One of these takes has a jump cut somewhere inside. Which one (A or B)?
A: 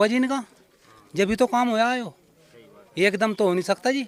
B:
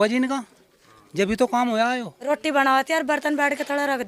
B